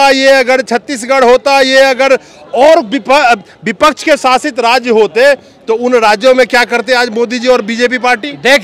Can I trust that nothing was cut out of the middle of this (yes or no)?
yes